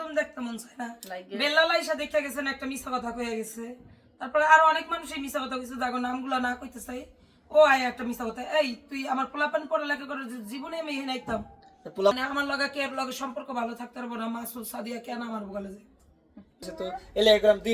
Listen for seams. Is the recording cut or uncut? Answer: cut